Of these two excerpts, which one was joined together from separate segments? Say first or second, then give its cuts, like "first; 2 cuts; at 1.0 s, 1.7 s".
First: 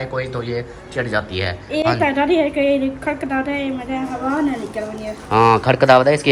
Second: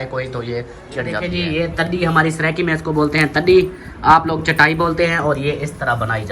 second; 1 cut; at 1.2 s